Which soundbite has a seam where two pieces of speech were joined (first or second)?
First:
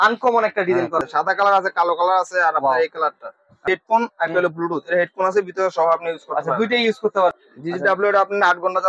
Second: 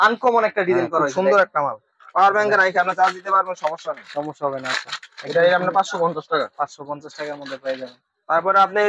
first